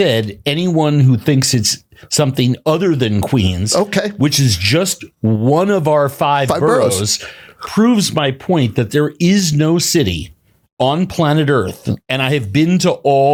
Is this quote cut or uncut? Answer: uncut